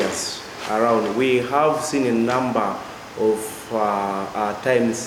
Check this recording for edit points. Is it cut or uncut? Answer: uncut